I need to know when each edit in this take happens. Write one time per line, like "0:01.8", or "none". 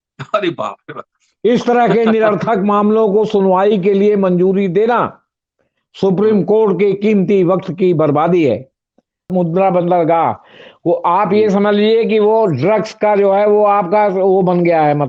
0:09.3